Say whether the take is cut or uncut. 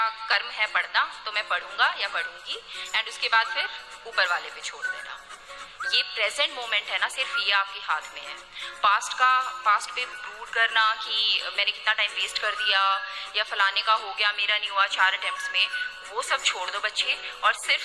cut